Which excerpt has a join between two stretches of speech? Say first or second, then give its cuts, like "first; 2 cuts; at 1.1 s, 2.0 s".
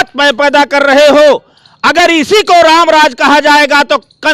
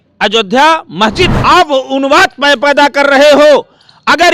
second; 1 cut; at 1.3 s